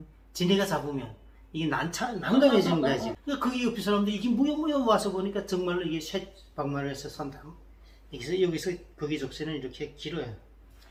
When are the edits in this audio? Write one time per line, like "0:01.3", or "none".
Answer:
none